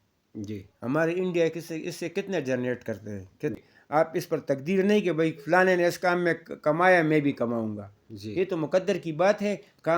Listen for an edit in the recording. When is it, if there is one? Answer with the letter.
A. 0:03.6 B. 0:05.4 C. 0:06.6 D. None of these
A